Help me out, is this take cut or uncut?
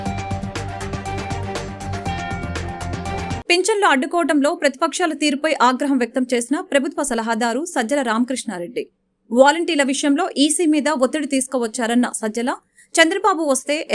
uncut